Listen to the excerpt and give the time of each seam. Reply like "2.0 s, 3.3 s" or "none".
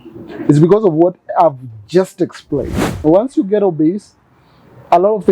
2.8 s